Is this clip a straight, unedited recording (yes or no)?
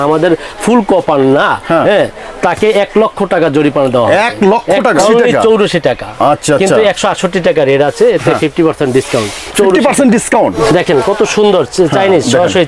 no